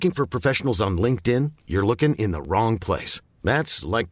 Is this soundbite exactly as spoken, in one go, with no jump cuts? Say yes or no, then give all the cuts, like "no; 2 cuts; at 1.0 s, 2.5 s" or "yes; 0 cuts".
yes; 0 cuts